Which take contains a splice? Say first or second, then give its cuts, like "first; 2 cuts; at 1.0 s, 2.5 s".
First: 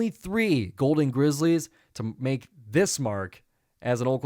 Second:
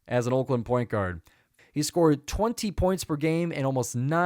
second; 1 cut; at 1.5 s